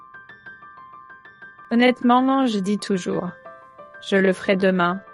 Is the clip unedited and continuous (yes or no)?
no